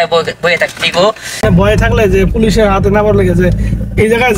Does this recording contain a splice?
yes; 1 cut; at 1.4 s

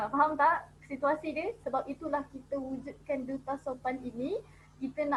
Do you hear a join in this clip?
no; 0 cuts

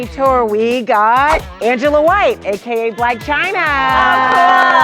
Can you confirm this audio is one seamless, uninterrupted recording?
yes; 0 cuts

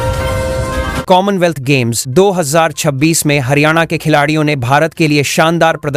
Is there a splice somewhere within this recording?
no; 0 cuts

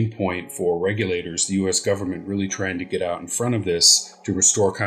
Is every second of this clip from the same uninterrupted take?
yes; 0 cuts

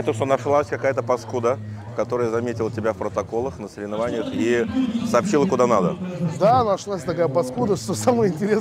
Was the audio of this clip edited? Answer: no; 0 cuts

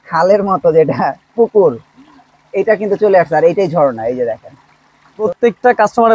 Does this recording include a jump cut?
yes; 1 cut; at 5.2 s

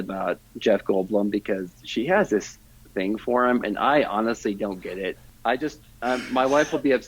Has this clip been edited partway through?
yes; 1 cut; at 5.2 s

